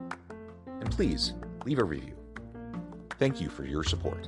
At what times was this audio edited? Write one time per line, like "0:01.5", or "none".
none